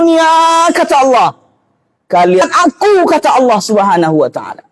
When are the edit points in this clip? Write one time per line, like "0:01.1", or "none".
0:02.4